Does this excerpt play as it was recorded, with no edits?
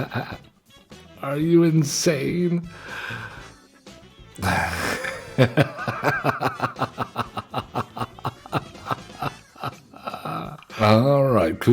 no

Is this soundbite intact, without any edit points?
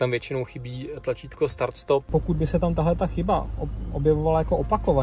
no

